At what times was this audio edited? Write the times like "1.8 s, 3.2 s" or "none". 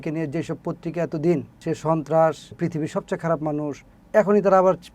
1.6 s, 2.5 s, 3.9 s